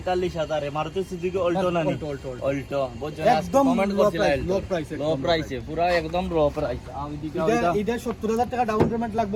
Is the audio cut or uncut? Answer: uncut